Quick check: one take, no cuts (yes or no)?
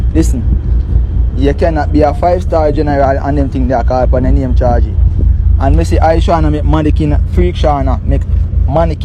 yes